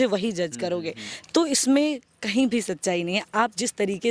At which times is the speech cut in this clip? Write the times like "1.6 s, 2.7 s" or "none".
none